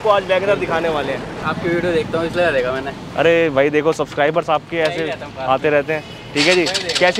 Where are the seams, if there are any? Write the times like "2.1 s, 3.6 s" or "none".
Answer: 1.3 s